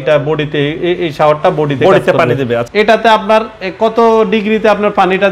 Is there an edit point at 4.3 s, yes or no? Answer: no